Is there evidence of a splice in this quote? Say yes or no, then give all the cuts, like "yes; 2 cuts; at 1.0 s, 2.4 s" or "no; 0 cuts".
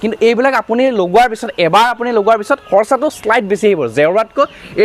no; 0 cuts